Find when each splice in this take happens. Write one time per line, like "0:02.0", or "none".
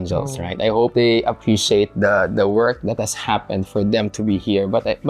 0:00.9